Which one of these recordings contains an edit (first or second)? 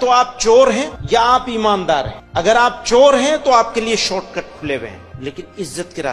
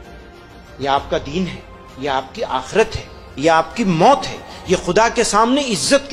first